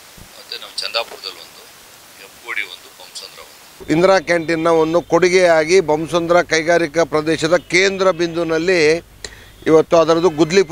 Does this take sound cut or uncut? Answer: cut